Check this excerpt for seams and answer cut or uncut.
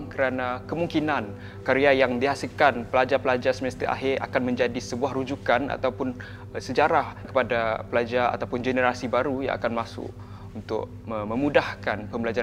cut